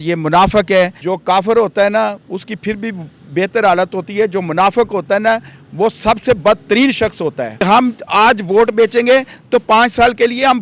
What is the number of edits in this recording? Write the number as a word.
two